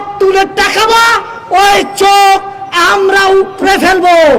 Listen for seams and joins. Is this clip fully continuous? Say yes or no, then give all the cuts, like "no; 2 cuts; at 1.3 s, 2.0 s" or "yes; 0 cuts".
yes; 0 cuts